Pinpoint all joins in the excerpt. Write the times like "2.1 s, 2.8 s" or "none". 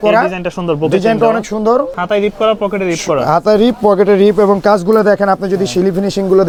none